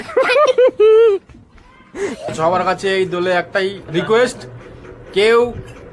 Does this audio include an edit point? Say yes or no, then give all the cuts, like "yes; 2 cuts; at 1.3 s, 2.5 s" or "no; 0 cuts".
yes; 1 cut; at 2.2 s